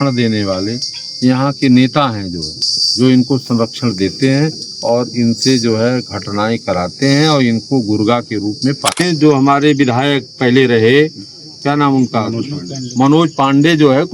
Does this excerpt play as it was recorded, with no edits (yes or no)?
no